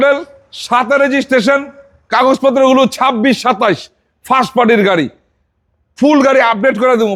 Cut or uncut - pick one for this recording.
uncut